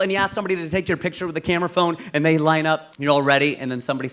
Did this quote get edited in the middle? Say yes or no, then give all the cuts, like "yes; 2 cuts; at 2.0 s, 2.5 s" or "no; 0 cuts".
yes; 1 cut; at 2.9 s